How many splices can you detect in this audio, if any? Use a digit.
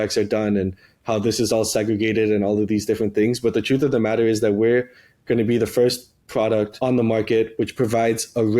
1